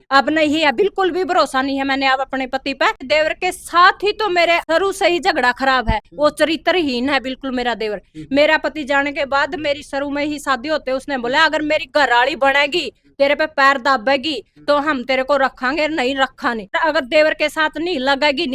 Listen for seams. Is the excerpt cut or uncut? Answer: cut